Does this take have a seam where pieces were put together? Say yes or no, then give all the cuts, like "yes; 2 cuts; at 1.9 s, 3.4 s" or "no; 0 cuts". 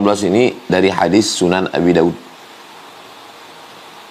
no; 0 cuts